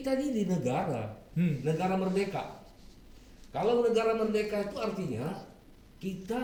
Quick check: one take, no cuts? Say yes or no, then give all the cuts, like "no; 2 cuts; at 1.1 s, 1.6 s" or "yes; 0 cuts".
yes; 0 cuts